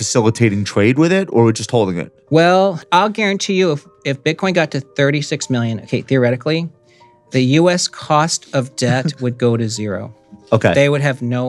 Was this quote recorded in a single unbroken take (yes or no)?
no